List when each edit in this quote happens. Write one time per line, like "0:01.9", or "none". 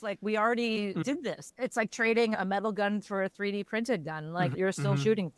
0:01.4
0:02.3
0:04.5